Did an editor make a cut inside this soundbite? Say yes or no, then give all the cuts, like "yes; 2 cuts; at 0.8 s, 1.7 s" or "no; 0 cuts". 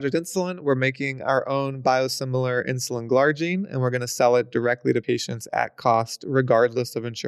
no; 0 cuts